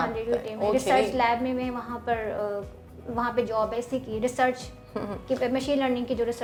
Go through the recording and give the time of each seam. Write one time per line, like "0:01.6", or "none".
none